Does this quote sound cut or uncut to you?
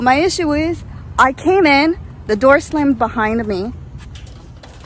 uncut